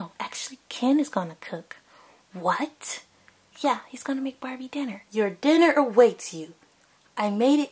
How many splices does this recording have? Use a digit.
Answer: 1